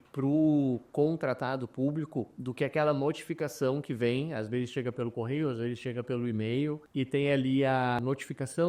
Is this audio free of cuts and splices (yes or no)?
no